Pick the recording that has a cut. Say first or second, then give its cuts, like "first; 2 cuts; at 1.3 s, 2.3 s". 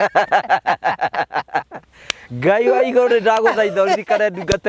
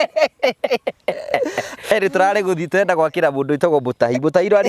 second; 1 cut; at 1.7 s